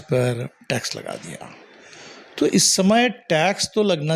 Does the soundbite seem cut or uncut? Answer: uncut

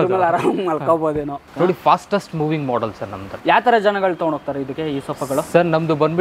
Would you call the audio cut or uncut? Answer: cut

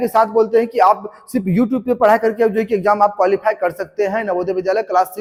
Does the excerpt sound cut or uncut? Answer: uncut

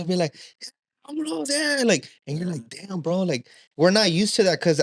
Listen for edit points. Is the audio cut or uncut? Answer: uncut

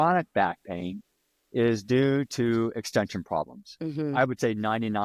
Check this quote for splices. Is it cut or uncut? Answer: uncut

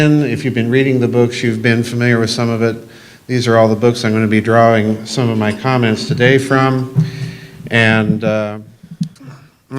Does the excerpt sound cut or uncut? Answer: cut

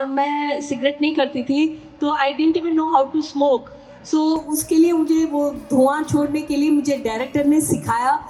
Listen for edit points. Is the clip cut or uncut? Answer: uncut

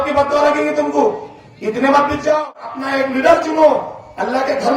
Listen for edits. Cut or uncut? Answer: cut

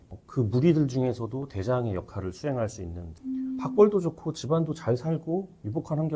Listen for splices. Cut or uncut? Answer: cut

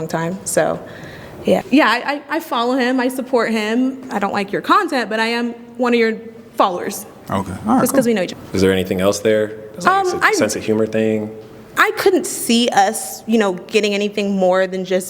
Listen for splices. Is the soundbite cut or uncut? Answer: cut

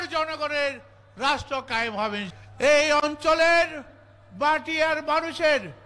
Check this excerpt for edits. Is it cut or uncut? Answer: cut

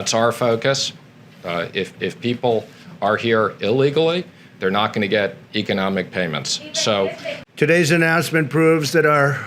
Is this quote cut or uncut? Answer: cut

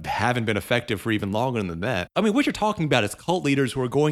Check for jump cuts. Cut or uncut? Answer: cut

